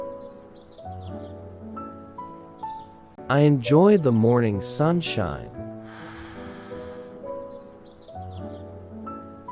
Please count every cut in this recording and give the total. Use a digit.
1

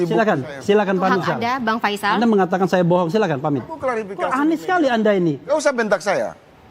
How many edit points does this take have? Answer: 1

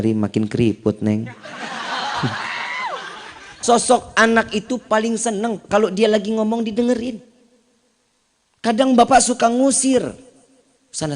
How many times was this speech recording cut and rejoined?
1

